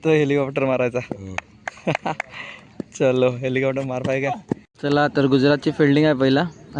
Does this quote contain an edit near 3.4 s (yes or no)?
no